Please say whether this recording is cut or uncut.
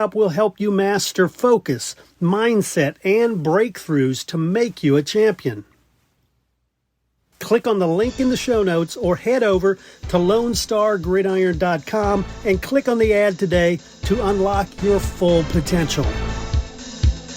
cut